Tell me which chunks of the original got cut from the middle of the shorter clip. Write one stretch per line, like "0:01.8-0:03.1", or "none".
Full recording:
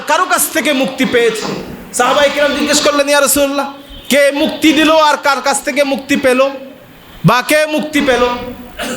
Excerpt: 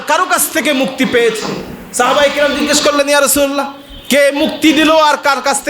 none